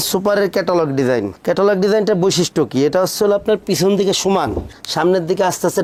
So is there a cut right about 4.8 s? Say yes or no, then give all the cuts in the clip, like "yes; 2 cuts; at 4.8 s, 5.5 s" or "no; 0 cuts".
no; 0 cuts